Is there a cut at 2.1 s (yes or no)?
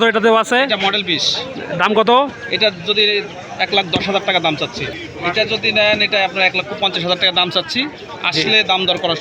no